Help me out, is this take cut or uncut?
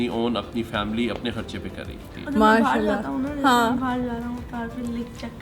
cut